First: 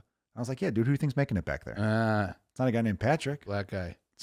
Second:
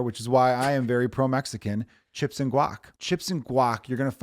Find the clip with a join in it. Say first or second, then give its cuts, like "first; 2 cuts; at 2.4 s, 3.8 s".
second; 1 cut; at 2.9 s